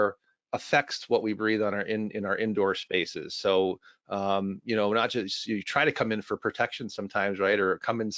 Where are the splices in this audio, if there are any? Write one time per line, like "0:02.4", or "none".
none